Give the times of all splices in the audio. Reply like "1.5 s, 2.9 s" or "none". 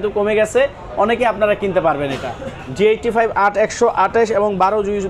none